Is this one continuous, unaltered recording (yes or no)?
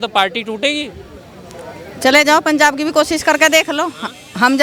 yes